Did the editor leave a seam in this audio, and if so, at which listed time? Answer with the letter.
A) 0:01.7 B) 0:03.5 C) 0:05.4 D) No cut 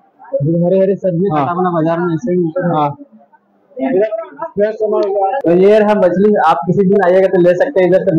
C